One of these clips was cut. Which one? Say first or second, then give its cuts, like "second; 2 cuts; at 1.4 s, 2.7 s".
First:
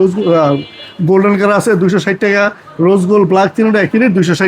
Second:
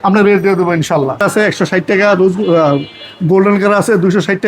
second; 1 cut; at 1.2 s